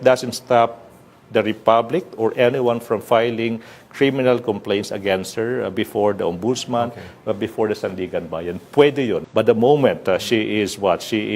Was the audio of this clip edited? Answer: yes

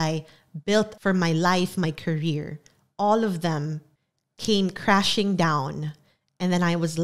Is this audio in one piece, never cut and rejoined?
yes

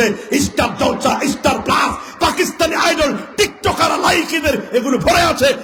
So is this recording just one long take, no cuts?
yes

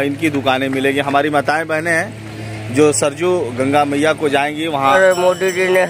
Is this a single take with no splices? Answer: no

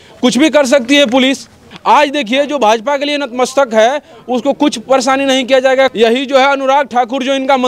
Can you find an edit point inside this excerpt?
yes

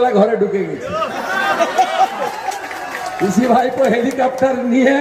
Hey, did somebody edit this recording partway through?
no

